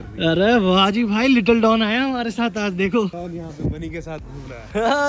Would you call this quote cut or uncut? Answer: cut